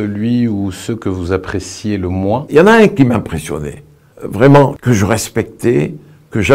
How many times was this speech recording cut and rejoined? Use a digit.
1